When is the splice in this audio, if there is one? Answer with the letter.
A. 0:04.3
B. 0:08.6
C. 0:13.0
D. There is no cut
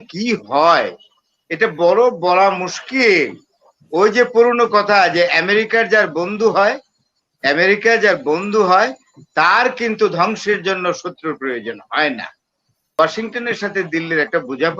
C